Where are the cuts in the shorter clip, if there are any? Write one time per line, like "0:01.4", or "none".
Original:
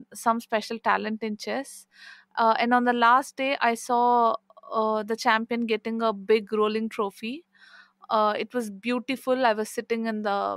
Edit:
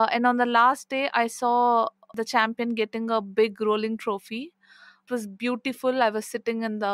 0:02.1
0:05.0